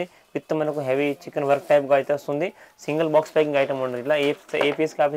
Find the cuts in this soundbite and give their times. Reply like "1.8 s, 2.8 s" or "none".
none